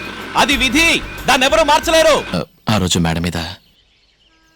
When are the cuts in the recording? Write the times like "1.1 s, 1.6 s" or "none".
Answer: 2.3 s